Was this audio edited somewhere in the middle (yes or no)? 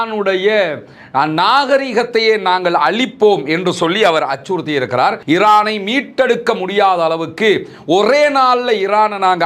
yes